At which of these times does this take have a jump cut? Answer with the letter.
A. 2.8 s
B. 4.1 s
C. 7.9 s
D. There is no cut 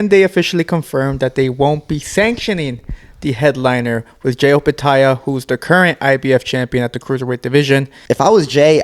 C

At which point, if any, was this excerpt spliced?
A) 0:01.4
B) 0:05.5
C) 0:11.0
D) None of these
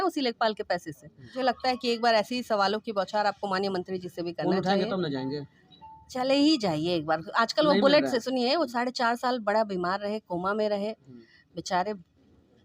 A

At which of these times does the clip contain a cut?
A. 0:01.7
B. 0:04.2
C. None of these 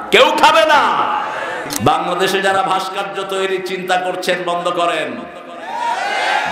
A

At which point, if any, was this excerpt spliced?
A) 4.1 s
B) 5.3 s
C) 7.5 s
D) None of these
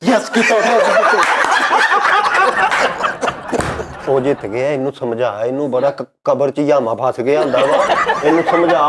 A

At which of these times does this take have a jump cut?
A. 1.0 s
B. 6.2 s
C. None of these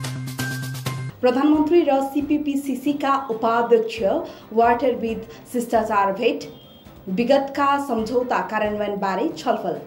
A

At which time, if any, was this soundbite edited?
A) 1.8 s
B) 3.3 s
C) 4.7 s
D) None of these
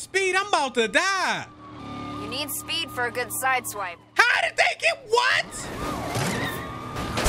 A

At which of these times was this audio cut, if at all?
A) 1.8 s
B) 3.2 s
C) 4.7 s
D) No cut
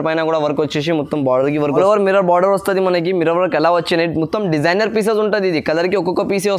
A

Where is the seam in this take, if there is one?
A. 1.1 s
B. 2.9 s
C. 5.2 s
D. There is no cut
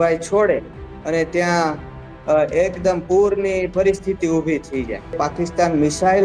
C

